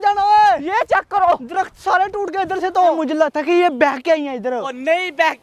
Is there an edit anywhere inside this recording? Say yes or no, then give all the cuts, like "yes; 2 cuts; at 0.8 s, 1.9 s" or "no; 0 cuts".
yes; 1 cut; at 3.0 s